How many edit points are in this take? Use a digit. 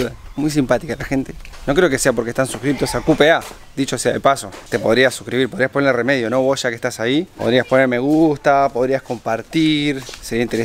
0